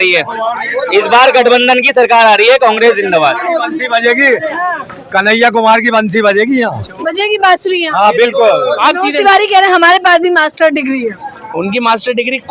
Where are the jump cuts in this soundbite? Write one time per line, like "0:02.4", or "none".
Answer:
0:08.8